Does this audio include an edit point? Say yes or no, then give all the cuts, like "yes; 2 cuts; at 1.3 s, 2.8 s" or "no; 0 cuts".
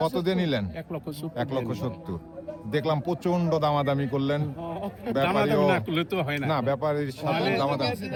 no; 0 cuts